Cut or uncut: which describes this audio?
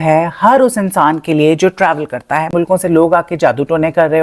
cut